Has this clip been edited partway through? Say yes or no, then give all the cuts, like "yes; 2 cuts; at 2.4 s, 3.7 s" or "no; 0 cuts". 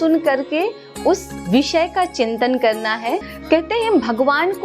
yes; 1 cut; at 3.3 s